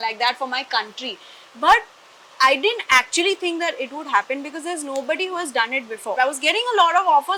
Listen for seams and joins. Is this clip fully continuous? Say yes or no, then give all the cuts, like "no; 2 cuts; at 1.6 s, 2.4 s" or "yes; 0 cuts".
no; 1 cut; at 6.2 s